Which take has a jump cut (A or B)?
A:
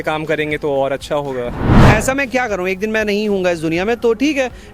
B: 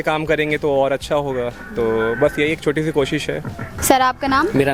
A